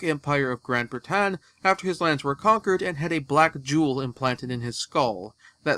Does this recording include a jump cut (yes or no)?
yes